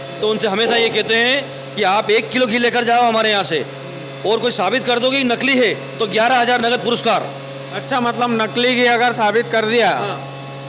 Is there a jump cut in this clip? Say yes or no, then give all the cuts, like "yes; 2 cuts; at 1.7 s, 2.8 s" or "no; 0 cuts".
no; 0 cuts